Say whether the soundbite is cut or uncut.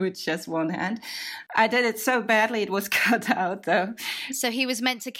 cut